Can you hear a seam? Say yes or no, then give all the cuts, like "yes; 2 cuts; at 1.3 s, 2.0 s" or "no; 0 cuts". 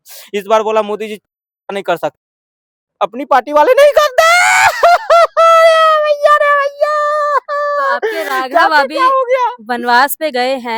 no; 0 cuts